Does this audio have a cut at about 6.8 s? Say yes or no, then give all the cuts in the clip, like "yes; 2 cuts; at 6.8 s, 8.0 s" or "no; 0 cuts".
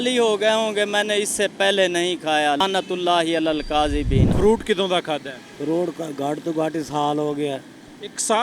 no; 2 cuts; at 2.6 s, 4.3 s